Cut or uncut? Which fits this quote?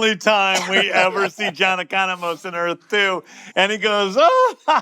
cut